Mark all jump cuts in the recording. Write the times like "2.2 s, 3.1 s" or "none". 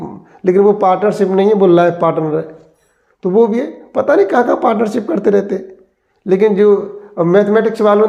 none